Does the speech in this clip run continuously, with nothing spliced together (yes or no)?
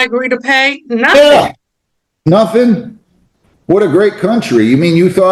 yes